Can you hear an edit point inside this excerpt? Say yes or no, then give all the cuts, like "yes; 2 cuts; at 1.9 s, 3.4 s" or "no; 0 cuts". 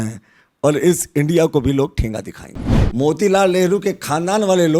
yes; 1 cut; at 2.8 s